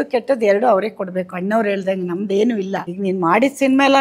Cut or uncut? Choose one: cut